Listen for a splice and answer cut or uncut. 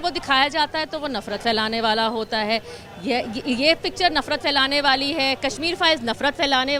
uncut